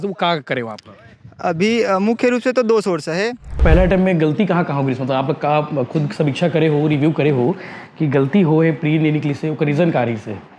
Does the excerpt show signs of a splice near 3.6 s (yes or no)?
yes